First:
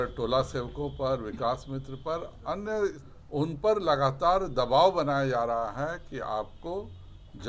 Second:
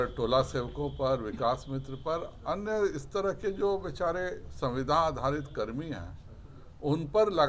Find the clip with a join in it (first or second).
first